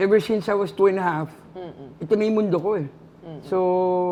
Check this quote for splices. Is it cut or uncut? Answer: uncut